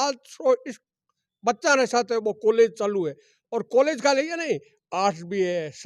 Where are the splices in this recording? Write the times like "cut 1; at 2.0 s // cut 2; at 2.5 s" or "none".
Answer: none